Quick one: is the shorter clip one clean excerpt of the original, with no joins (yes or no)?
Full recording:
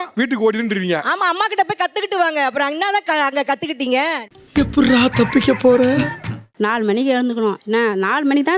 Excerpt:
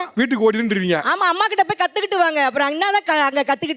yes